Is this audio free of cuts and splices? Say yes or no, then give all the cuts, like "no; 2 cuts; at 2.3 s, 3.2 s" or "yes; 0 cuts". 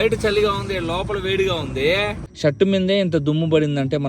no; 1 cut; at 2.2 s